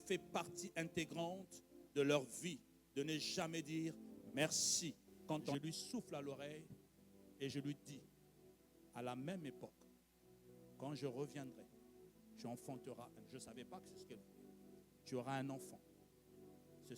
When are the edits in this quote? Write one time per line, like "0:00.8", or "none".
0:05.5